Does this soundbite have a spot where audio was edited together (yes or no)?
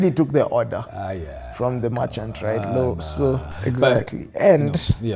yes